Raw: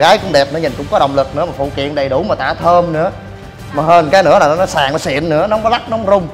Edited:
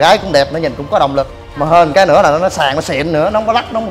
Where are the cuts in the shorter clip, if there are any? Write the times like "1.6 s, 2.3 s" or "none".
1.3 s